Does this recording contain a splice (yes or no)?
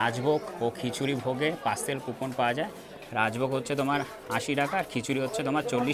no